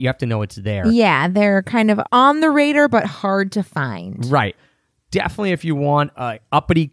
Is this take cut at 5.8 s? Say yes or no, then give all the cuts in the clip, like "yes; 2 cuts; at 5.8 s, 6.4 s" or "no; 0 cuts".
no; 2 cuts; at 2.0 s, 4.6 s